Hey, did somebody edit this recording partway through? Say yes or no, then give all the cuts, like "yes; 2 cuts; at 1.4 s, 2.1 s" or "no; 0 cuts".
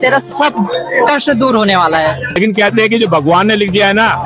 yes; 1 cut; at 2.4 s